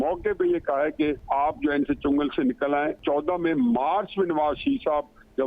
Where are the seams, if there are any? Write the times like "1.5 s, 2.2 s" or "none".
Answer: 1.2 s, 3.0 s